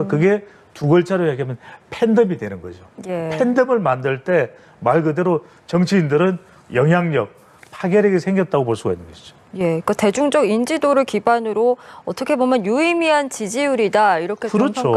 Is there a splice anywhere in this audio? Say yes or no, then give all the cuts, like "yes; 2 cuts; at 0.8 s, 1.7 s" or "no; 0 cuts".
no; 0 cuts